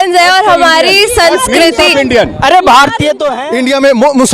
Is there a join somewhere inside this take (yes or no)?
yes